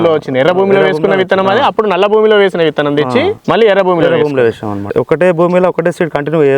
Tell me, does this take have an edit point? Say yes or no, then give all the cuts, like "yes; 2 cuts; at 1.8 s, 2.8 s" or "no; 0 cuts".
yes; 1 cut; at 4.9 s